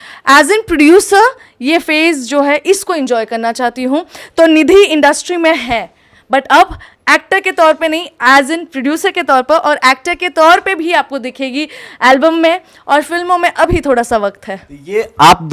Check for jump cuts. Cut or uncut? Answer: uncut